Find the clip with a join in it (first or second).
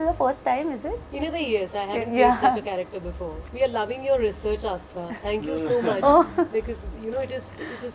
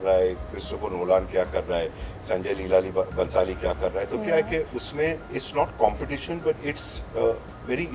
first